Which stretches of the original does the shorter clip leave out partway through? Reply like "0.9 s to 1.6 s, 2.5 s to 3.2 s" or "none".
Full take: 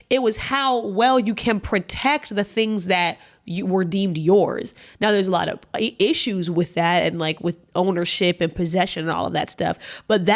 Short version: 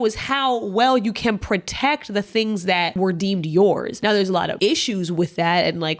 3.2 s to 3.7 s, 4.9 s to 5.6 s